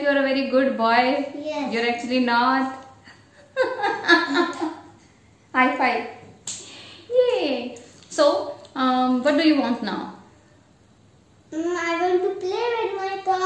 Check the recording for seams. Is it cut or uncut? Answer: uncut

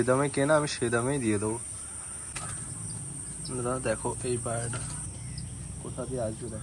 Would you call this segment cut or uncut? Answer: cut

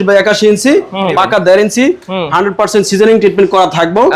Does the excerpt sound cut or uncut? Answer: cut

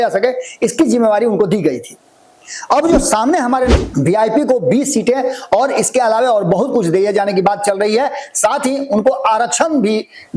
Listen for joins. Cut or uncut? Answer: cut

